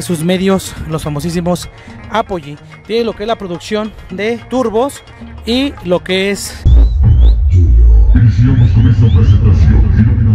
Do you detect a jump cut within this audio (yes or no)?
yes